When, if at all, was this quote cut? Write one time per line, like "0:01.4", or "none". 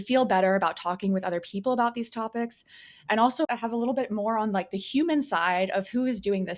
0:03.5